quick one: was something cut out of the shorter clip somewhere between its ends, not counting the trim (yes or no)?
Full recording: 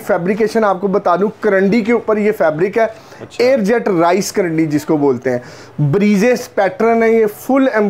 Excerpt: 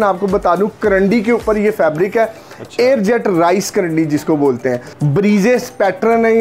yes